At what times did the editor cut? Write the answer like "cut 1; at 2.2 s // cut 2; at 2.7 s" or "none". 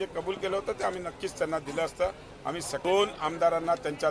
cut 1; at 2.8 s